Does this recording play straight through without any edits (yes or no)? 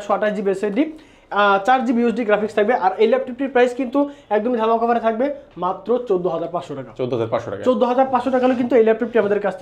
yes